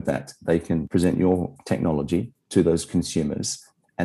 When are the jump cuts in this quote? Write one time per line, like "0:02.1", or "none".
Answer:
0:00.9
0:02.4

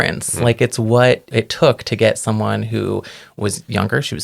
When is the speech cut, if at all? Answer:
0:01.3

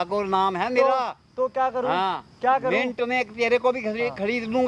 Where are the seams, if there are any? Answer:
none

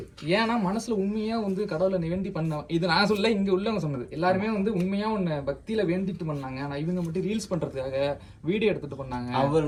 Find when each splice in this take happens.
none

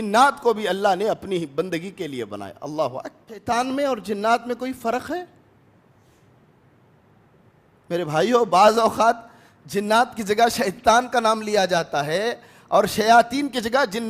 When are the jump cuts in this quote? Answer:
0:03.4

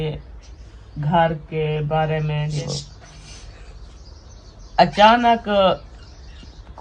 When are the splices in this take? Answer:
0:02.5

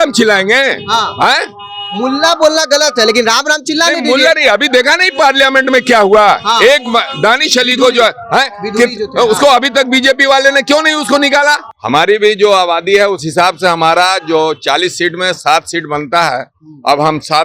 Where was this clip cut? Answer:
0:11.7

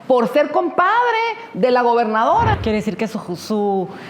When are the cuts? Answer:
0:02.6

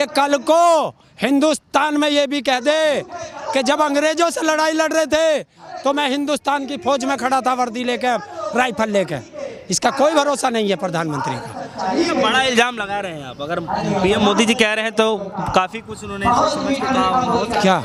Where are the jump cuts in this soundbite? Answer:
none

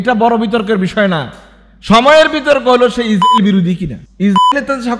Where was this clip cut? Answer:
none

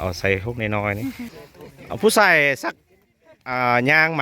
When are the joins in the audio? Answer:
0:01.2

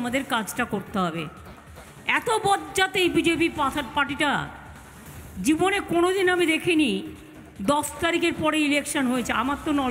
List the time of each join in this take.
none

